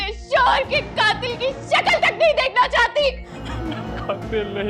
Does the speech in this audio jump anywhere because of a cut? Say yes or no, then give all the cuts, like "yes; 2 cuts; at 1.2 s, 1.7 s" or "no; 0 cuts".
yes; 1 cut; at 3.4 s